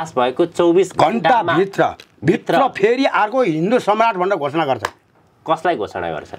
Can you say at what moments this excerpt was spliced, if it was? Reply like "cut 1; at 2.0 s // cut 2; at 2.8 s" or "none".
none